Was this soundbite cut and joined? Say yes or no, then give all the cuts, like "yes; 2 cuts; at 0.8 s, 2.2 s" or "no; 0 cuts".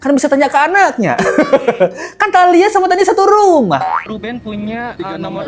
yes; 1 cut; at 4.0 s